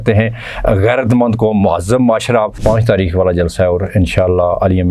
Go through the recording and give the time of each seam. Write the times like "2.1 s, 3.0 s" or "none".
2.6 s